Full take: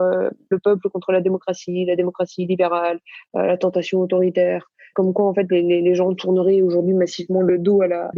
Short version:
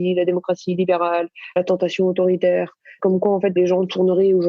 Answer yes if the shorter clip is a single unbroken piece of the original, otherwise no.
no